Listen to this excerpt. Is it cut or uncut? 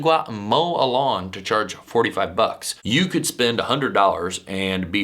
cut